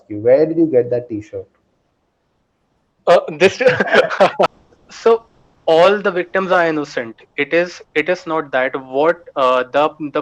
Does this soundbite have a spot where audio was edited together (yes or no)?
yes